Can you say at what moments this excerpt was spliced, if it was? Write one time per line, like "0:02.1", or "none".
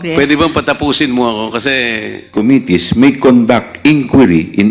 0:02.3